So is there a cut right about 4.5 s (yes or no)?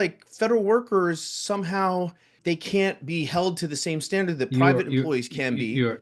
no